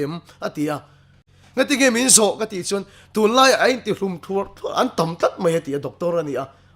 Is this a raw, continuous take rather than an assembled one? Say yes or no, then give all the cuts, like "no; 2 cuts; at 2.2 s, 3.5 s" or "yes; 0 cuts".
no; 1 cut; at 1.2 s